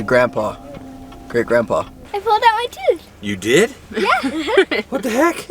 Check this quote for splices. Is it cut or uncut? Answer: cut